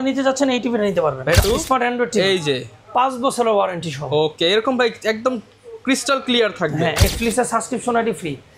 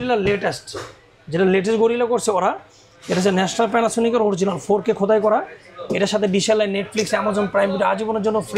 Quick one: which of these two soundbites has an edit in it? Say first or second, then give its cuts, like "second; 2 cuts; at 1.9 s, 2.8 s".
first; 2 cuts; at 1.4 s, 7.0 s